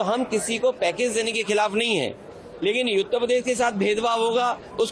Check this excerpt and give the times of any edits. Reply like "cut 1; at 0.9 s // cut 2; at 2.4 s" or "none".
none